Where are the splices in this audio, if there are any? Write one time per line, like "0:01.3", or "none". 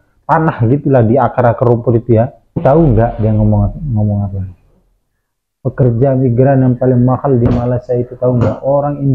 0:02.6